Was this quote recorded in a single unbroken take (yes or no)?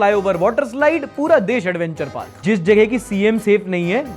no